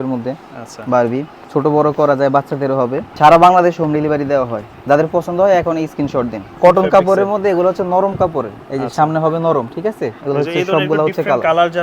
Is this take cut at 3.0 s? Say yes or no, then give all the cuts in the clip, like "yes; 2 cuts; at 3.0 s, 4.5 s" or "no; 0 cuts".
yes; 4 cuts; at 1.4 s, 3.0 s, 6.5 s, 10.2 s